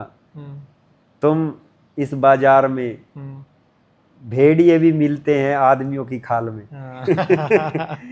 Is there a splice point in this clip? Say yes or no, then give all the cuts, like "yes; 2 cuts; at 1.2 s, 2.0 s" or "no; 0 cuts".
no; 0 cuts